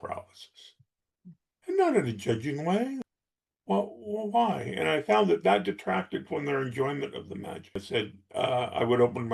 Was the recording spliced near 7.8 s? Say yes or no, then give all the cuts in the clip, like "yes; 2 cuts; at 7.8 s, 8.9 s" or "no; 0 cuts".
yes; 2 cuts; at 3.0 s, 7.8 s